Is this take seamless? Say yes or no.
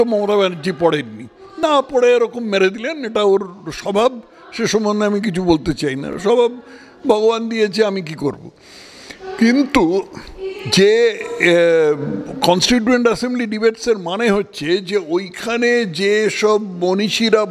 yes